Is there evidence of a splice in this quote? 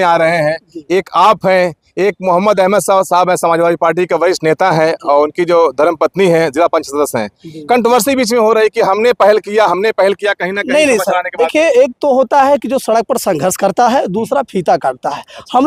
no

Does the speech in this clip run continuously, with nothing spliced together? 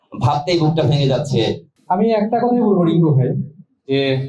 no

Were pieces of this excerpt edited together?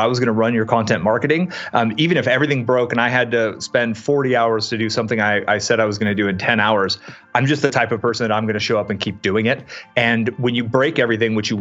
no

